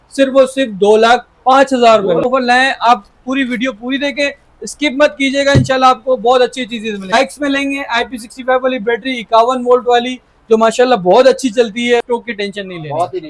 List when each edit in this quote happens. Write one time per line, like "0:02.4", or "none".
0:02.2
0:07.1
0:12.0